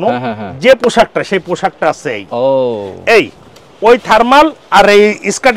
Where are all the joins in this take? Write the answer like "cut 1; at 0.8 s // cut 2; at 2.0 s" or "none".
none